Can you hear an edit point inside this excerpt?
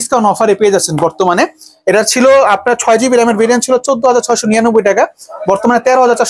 no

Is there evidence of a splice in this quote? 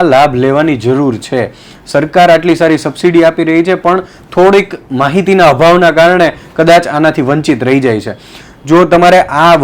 no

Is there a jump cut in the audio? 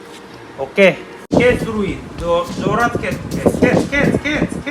yes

